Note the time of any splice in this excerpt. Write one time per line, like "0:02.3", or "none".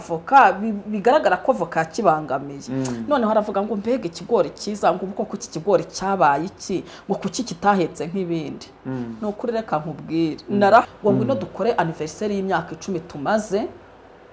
0:10.8